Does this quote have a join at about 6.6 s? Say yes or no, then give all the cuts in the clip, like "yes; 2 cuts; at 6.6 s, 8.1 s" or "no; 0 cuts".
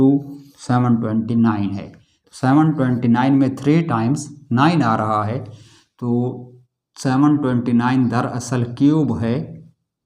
no; 0 cuts